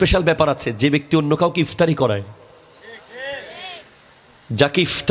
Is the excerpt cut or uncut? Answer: uncut